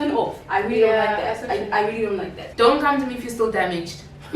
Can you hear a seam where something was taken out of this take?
yes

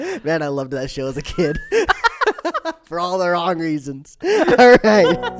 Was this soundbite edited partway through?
no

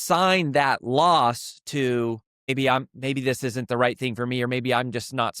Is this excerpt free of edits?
no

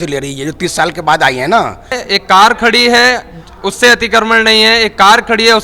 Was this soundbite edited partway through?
yes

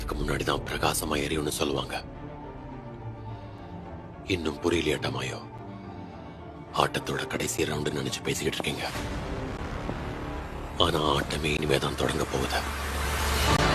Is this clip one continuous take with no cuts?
yes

